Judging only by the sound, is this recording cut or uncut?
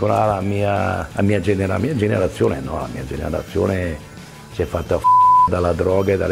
uncut